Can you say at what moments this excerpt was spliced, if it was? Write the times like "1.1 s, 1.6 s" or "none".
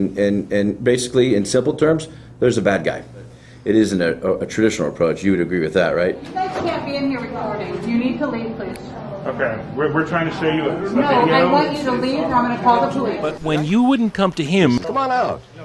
3.5 s, 6.3 s, 13.3 s